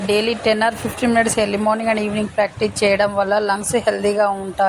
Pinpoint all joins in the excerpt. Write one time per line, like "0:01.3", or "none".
none